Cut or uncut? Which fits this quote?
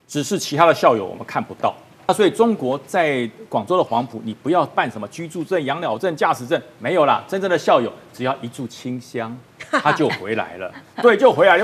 cut